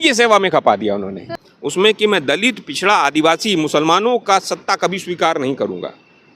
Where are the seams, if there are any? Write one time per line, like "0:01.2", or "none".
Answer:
0:01.2